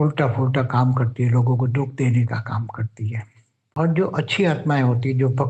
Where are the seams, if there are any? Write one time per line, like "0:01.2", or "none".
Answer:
0:03.8